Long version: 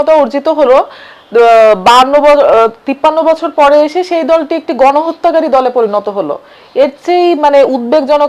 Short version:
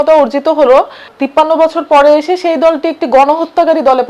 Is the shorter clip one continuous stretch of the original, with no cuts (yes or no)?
no